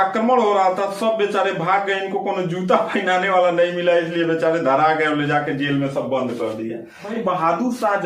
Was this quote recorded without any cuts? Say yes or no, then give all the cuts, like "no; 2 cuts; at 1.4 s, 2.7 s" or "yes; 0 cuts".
no; 1 cut; at 7.0 s